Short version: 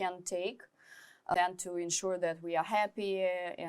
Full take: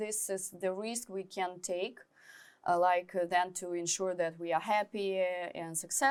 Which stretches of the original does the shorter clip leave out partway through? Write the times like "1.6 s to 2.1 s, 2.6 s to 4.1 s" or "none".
2.7 s to 3.3 s